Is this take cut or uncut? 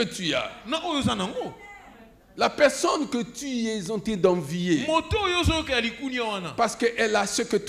uncut